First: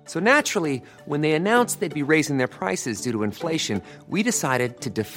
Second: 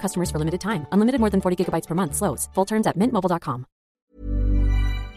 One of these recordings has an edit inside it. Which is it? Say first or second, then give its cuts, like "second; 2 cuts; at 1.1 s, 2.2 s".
second; 1 cut; at 4.0 s